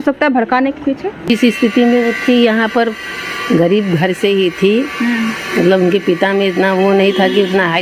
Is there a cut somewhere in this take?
yes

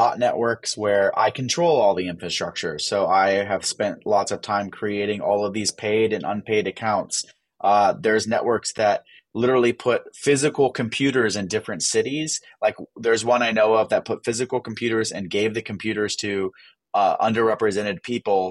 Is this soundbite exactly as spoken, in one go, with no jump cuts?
yes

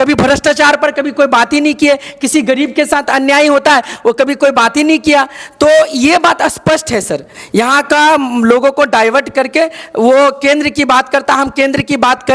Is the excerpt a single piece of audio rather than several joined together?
yes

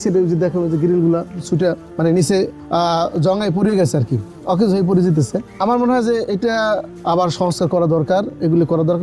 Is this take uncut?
yes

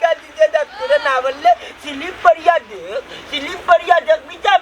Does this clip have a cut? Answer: no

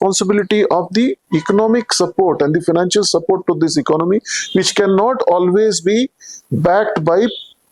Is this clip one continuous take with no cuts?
yes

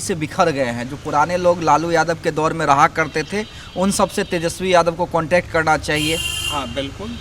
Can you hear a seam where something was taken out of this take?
no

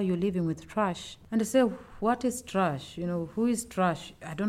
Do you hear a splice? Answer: no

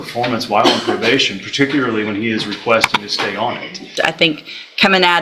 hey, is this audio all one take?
no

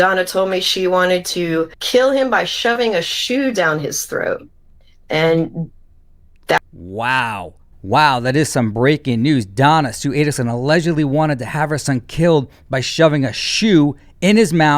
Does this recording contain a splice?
no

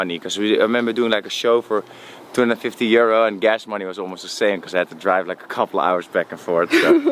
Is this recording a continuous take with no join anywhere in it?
yes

